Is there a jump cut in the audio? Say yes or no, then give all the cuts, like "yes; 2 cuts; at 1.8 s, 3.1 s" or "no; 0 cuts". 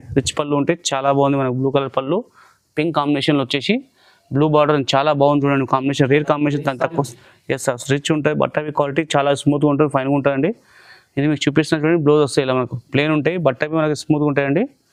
no; 0 cuts